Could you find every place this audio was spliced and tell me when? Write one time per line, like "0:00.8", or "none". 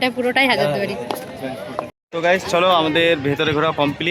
0:01.9